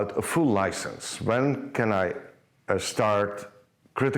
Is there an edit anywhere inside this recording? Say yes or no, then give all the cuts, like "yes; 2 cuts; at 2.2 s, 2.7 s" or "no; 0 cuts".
no; 0 cuts